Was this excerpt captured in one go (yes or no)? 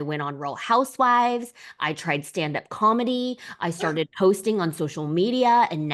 yes